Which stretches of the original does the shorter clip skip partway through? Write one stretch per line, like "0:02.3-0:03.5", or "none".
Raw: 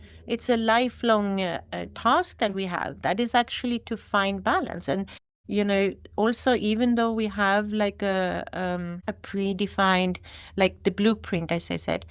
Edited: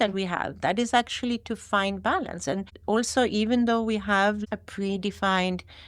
0:05.2-0:06.0
0:07.7-0:09.0